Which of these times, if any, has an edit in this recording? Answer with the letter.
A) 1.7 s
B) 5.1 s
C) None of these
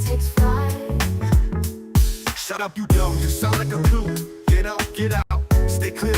B